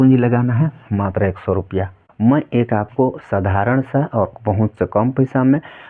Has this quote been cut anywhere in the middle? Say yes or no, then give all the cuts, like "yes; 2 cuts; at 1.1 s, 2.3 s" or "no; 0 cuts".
yes; 1 cut; at 2.0 s